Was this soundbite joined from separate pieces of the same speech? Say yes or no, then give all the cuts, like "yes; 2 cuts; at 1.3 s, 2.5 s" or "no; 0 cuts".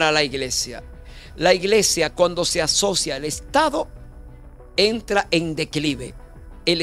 no; 0 cuts